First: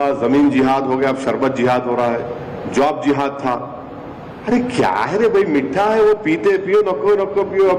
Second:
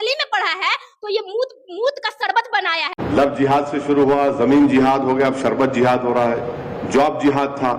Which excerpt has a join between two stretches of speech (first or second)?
second